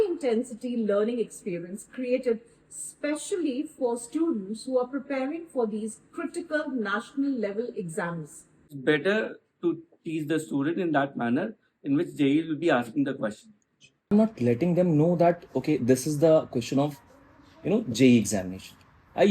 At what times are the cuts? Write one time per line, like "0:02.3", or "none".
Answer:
0:08.7
0:14.1